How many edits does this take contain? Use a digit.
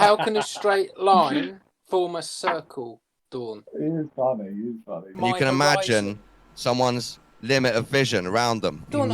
1